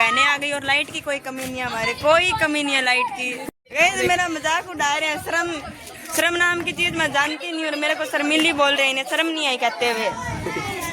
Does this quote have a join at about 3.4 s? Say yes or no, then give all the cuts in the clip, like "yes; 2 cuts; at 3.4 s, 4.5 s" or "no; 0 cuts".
yes; 1 cut; at 3.4 s